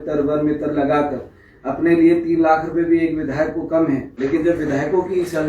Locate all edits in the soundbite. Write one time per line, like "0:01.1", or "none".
0:04.1